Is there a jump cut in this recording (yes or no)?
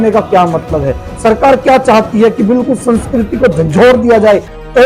no